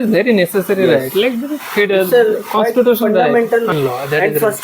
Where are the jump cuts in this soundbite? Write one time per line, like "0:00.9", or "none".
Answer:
0:03.7